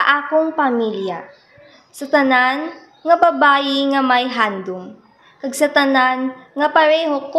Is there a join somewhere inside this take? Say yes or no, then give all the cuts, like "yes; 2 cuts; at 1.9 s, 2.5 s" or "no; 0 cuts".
no; 0 cuts